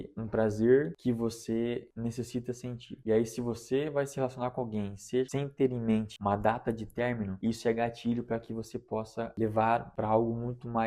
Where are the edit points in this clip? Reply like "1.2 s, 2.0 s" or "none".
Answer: 5.3 s, 6.1 s, 7.3 s, 9.3 s, 9.9 s